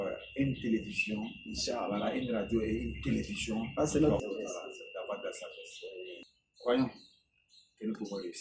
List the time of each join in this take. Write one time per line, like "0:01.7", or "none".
0:04.2
0:06.2